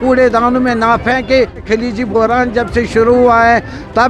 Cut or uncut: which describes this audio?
cut